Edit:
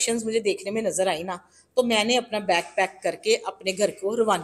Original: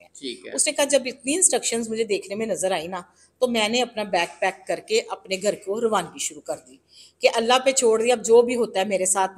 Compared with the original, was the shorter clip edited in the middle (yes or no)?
no